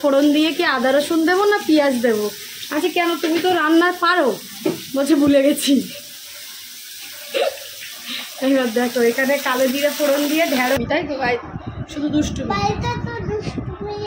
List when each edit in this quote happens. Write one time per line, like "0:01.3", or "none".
0:10.8